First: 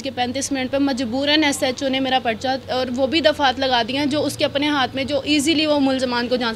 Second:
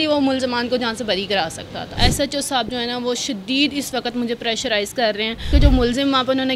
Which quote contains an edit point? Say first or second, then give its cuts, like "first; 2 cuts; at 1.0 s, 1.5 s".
second; 2 cuts; at 1.9 s, 5.5 s